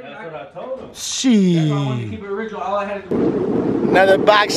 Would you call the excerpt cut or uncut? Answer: cut